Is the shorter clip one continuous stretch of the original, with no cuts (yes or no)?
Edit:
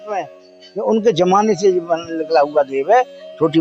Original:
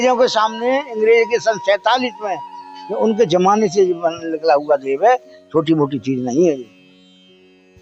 yes